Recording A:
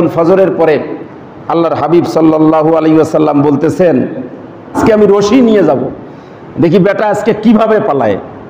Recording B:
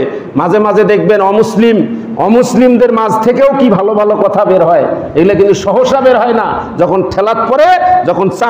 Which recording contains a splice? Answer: A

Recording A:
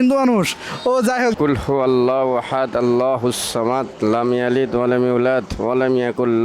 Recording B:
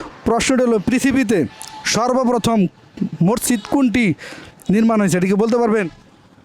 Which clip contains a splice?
A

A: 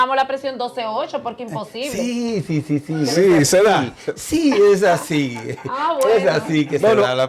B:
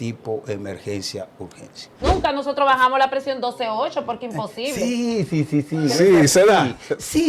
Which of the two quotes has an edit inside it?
B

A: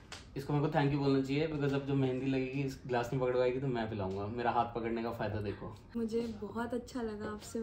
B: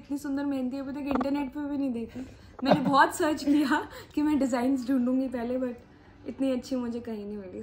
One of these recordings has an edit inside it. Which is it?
A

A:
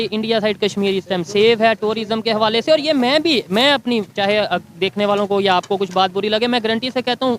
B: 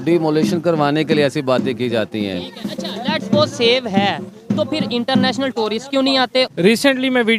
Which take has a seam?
B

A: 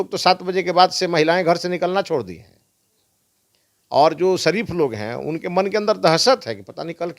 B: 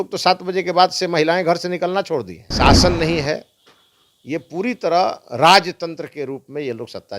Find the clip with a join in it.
B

